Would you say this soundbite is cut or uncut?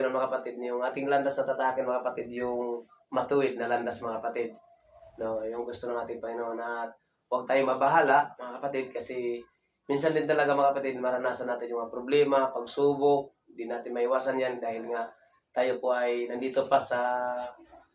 uncut